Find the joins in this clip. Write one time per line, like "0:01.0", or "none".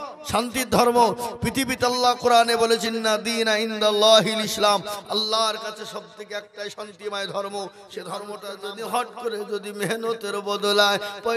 0:08.5